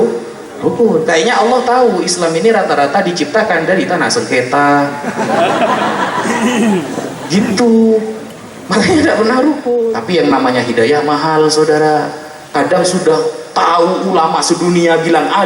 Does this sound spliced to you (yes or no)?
yes